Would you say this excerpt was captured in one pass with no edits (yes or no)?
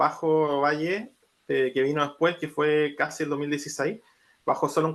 yes